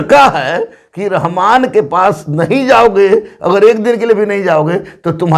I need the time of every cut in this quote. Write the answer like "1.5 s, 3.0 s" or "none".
none